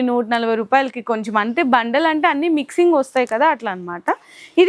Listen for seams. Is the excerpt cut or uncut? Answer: uncut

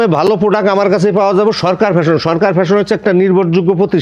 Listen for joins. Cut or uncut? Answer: uncut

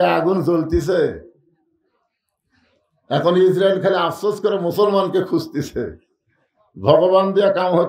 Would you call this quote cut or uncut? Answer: uncut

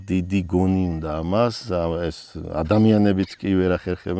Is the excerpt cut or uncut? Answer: uncut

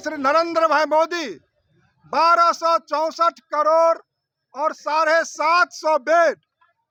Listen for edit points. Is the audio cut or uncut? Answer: uncut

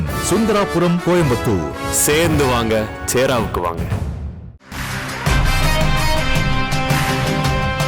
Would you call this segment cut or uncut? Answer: uncut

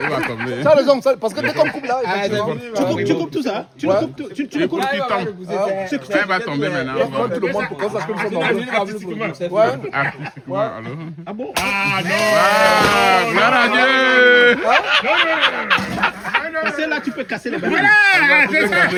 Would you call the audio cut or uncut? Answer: uncut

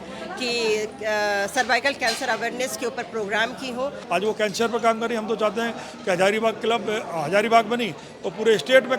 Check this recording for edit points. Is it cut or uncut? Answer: cut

